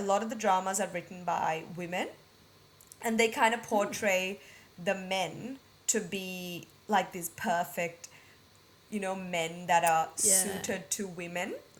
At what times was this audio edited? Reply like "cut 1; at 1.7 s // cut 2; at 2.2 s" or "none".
none